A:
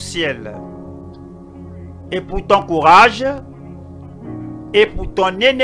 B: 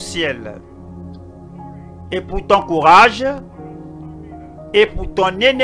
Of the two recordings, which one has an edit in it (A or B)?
A